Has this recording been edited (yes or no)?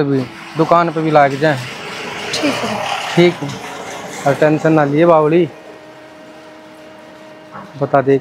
no